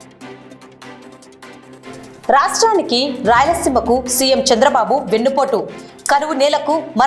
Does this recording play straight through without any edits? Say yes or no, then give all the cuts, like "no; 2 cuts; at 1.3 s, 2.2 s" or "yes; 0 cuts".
no; 1 cut; at 0.9 s